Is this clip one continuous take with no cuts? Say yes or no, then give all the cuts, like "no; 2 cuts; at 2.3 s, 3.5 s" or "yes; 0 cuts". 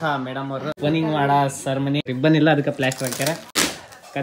no; 3 cuts; at 0.8 s, 2.1 s, 3.3 s